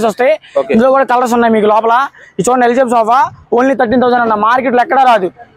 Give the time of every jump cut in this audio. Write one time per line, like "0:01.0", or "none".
none